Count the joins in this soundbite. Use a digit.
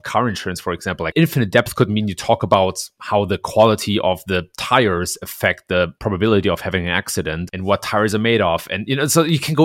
2